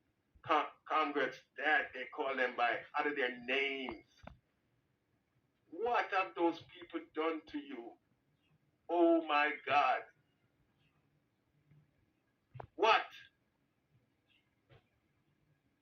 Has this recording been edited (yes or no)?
no